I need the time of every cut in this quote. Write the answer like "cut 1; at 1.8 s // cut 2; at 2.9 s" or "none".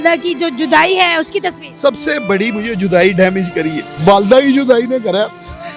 cut 1; at 3.8 s